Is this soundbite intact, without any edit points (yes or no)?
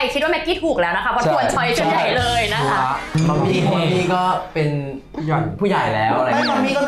no